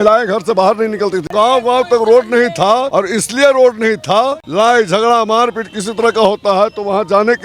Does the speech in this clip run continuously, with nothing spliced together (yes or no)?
no